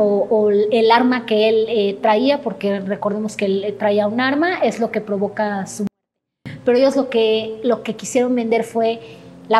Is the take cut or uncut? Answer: uncut